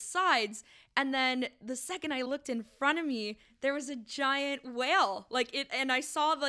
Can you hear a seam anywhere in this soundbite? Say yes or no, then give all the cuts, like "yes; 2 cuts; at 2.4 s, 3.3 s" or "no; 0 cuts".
no; 0 cuts